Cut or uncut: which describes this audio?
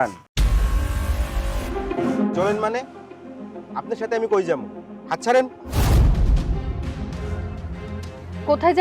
cut